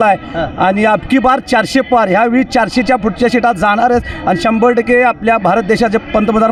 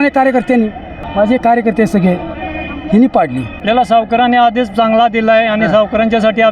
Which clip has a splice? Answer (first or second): second